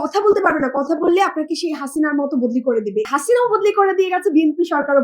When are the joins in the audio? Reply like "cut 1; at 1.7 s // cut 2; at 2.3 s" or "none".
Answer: cut 1; at 3.1 s

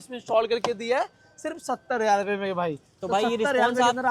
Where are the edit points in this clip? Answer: none

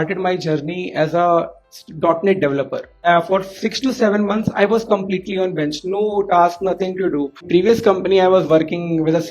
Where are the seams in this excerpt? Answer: cut 1; at 2.9 s // cut 2; at 7.4 s

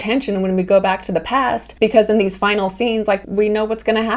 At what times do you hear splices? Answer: none

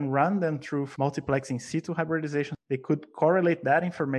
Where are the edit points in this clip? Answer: cut 1; at 0.9 s // cut 2; at 2.5 s

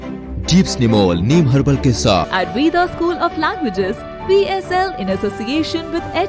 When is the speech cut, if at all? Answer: cut 1; at 2.3 s

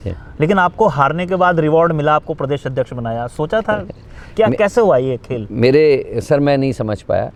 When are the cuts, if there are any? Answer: none

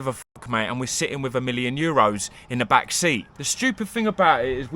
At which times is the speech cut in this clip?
cut 1; at 3.5 s

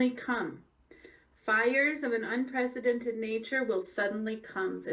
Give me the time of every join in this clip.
none

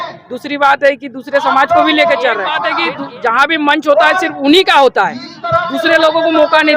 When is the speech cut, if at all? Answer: cut 1; at 2.6 s

